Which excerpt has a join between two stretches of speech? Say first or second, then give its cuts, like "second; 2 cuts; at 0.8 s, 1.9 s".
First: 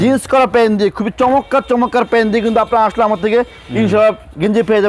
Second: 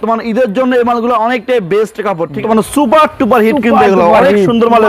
second; 1 cut; at 2.4 s